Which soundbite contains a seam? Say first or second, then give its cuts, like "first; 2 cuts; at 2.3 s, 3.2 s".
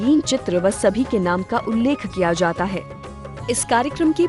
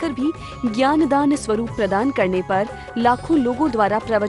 first; 1 cut; at 2.8 s